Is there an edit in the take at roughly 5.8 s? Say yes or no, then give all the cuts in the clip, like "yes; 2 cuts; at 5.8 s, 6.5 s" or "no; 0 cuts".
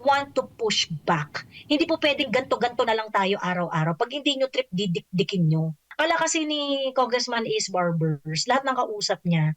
yes; 1 cut; at 5.8 s